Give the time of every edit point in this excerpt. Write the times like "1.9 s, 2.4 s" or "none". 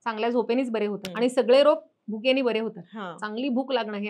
1.0 s